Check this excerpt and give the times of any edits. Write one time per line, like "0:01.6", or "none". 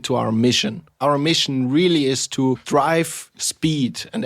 0:00.9
0:02.6

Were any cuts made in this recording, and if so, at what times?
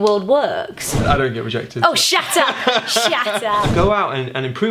0:01.0
0:03.7

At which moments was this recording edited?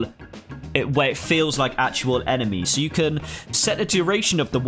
0:02.7

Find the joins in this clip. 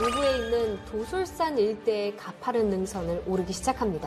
none

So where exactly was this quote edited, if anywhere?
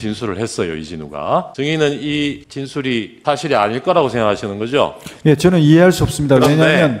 0:01.5
0:02.8

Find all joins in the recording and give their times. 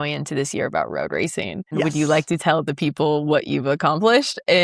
0:01.8

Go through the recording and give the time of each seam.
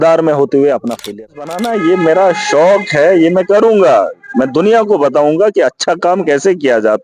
0:01.3

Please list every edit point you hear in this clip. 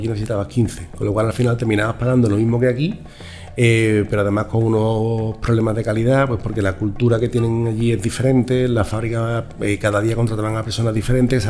none

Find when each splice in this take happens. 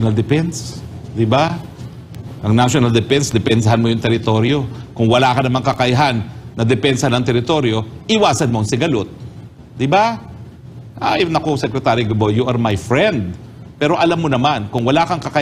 none

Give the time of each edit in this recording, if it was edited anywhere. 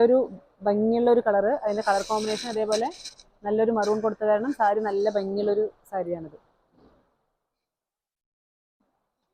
none

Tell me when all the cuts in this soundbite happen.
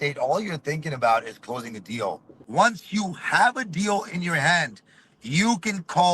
0:02.4

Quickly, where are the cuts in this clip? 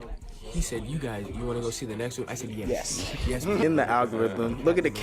0:03.6

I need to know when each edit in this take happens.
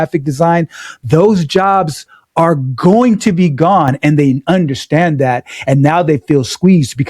none

